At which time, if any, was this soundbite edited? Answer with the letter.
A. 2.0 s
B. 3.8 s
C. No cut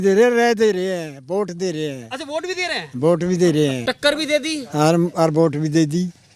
B